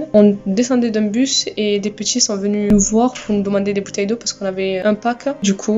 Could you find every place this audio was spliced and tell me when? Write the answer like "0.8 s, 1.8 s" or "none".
2.7 s, 4.8 s